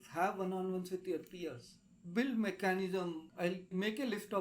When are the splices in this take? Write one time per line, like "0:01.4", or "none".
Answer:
0:03.2